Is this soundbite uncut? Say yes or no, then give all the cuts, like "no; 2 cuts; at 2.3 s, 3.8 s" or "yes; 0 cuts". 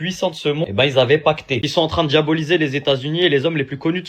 no; 1 cut; at 1.6 s